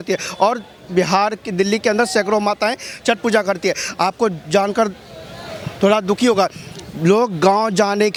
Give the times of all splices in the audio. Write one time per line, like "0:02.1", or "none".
none